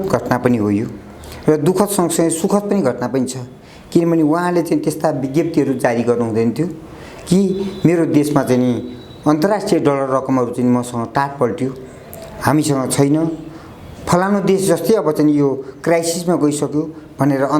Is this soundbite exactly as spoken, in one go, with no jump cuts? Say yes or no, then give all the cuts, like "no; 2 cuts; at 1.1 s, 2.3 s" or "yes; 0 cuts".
yes; 0 cuts